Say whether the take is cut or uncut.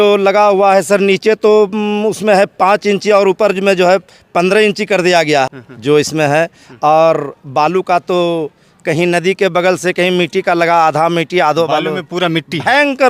cut